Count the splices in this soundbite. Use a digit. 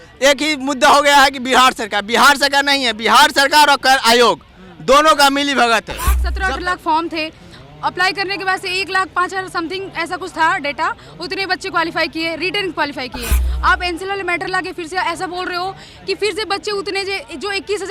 1